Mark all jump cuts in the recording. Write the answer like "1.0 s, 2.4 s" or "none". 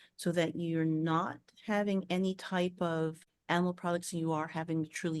3.3 s